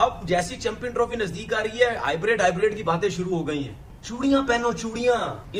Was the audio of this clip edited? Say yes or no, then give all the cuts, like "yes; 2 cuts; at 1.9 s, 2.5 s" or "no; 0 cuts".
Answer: no; 0 cuts